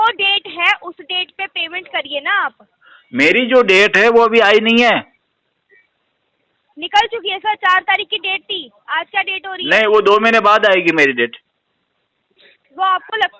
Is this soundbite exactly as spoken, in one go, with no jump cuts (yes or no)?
yes